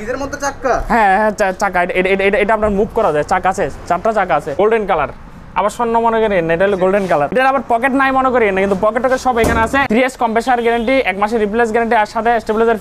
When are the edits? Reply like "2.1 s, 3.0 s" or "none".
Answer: 4.5 s, 7.3 s, 9.9 s